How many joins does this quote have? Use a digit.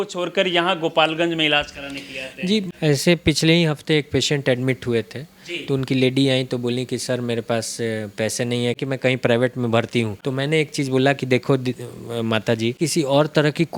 4